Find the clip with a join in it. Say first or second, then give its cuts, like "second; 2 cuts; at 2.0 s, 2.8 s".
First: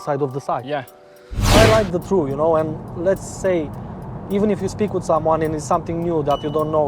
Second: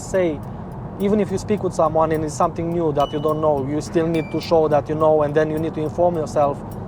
first; 1 cut; at 1.2 s